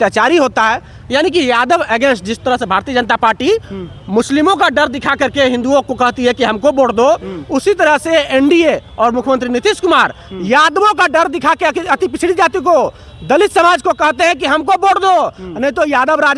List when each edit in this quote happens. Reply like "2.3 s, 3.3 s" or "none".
none